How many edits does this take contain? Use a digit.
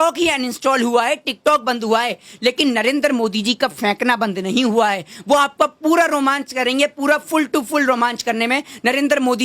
0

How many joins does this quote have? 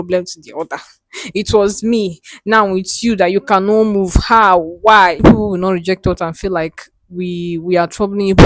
1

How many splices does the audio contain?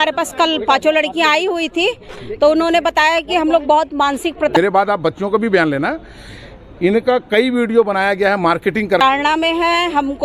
2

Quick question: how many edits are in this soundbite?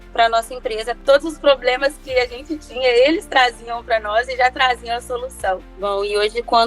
2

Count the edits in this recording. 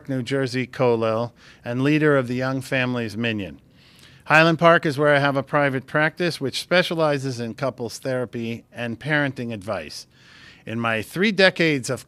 1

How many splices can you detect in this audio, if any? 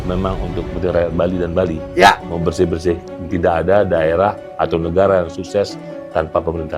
0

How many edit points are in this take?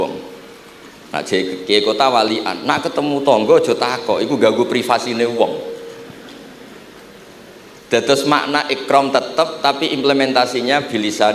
0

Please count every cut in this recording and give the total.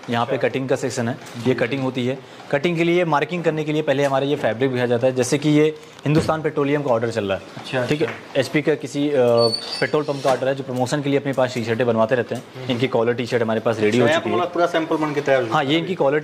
0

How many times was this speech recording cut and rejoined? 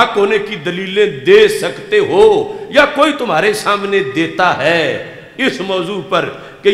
0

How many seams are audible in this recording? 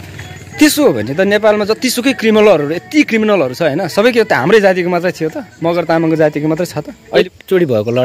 1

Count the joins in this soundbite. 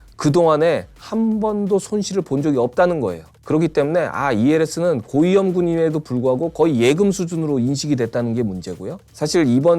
1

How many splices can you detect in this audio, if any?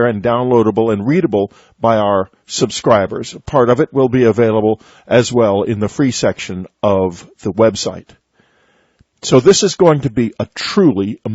1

